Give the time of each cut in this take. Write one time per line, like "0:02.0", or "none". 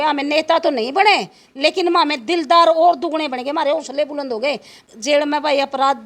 0:04.7